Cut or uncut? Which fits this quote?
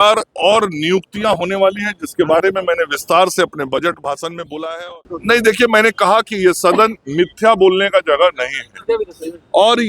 cut